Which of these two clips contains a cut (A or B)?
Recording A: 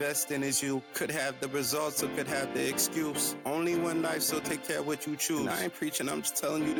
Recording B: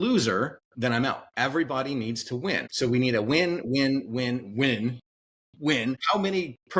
B